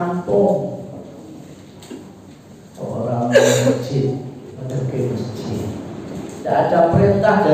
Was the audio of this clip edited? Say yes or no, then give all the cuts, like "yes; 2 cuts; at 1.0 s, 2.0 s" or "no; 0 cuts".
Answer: yes; 2 cuts; at 4.6 s, 6.4 s